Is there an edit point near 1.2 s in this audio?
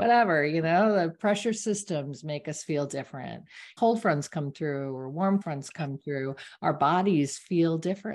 no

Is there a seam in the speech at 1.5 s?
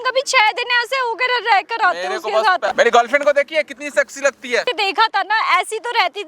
no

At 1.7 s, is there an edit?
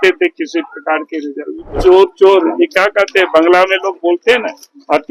yes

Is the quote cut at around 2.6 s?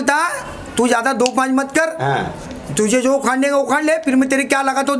no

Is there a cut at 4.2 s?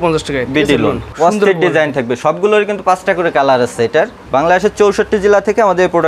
yes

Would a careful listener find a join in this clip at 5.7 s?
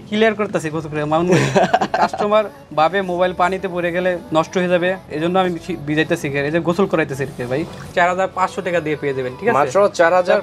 no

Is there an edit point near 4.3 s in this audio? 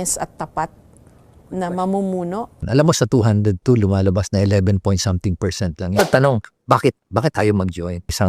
no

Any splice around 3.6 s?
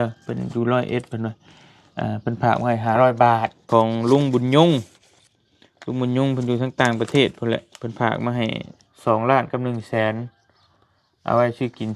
yes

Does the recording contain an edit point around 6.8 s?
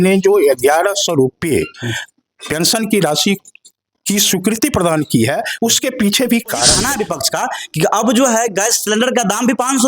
yes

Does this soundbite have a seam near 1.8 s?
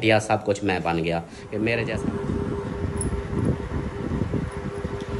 yes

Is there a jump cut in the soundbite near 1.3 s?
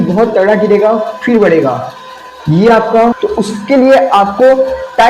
no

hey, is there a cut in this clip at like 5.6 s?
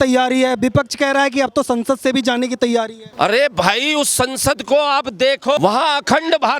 yes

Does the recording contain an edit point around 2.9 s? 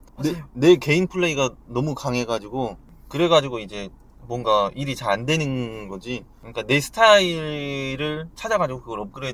no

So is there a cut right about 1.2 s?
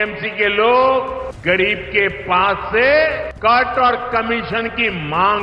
yes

